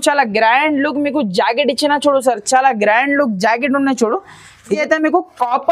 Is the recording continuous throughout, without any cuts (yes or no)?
no